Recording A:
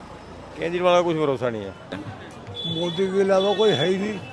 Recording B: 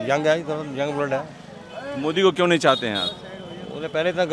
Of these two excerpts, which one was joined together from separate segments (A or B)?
A